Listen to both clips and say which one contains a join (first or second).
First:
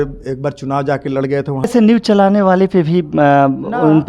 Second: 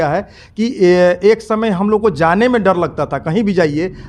first